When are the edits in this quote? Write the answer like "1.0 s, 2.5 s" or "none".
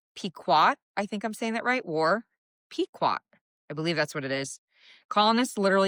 none